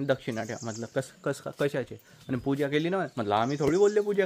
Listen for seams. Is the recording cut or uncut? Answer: uncut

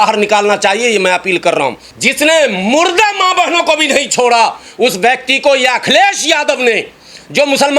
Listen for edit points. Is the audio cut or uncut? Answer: cut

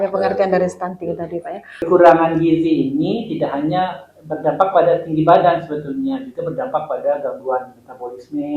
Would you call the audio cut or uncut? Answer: cut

